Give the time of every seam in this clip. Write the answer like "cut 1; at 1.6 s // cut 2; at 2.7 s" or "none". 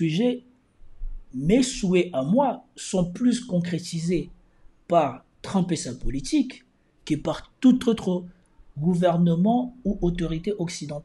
none